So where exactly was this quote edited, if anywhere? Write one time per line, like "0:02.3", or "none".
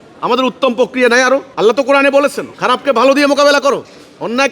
0:01.5
0:02.5